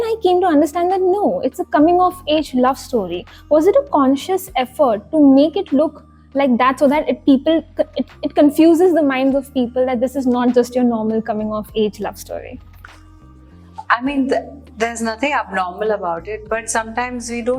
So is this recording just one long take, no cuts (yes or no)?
yes